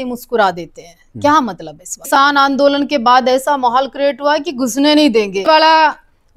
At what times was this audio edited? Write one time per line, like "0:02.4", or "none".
0:02.1
0:05.4